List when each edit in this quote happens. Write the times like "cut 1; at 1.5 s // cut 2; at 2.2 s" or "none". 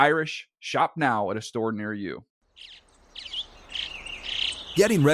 cut 1; at 2.2 s

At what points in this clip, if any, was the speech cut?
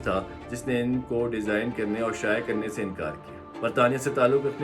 cut 1; at 3.4 s

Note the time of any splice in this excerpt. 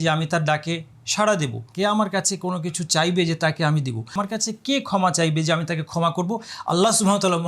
cut 1; at 1.6 s // cut 2; at 4.2 s

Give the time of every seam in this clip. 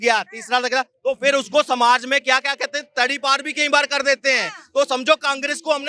none

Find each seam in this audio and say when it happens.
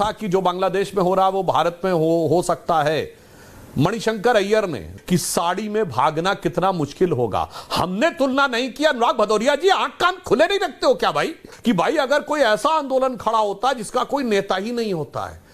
cut 1; at 4.9 s // cut 2; at 11.5 s

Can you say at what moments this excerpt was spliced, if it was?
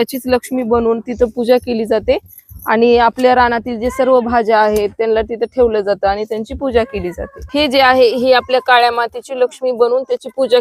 none

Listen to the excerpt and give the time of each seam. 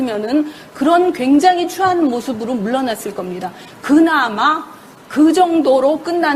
none

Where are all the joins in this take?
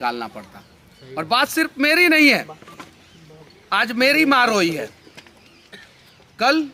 none

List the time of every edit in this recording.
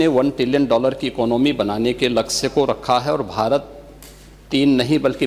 none

